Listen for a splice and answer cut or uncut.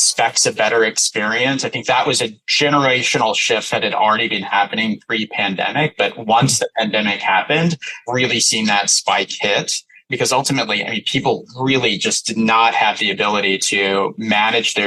uncut